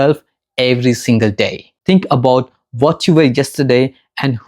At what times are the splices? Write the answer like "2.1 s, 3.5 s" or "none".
1.7 s